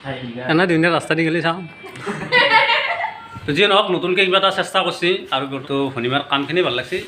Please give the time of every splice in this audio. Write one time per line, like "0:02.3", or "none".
0:03.3
0:05.6